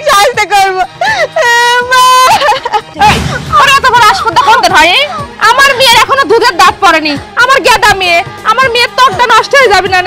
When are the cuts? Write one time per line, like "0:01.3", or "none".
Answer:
0:02.9